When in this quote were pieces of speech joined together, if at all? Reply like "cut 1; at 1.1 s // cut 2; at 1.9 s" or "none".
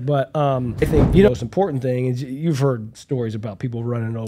cut 1; at 1.3 s